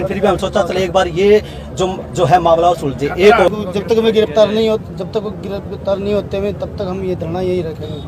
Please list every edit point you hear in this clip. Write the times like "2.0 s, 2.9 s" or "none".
3.5 s

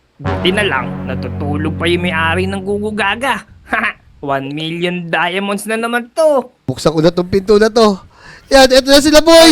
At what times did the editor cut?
6.6 s

